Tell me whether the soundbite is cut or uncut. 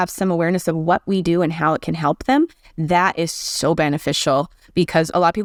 uncut